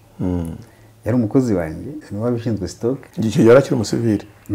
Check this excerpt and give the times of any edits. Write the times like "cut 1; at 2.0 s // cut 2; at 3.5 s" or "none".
cut 1; at 2.0 s // cut 2; at 3.1 s